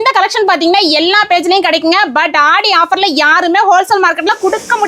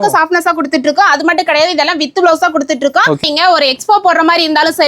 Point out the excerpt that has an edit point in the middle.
second; 1 cut; at 3.2 s

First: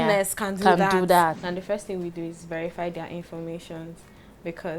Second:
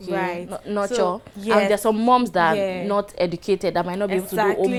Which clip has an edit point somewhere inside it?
first; 1 cut; at 1.4 s

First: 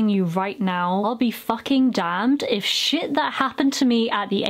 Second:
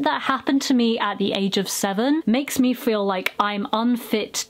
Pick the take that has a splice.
first; 1 cut; at 1.0 s

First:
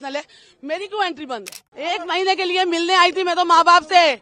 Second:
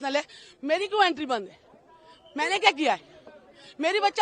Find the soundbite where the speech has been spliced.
first; 1 cut; at 1.6 s

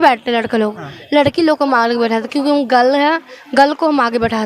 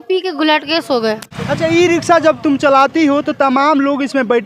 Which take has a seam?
second; 1 cut; at 1.3 s

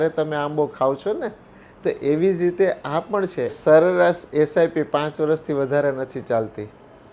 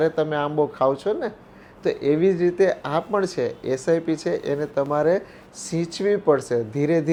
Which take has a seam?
first; 1 cut; at 3.6 s

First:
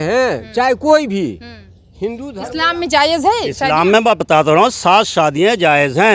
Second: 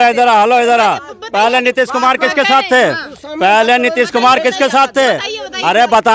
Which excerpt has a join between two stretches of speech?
first; 1 cut; at 2.3 s

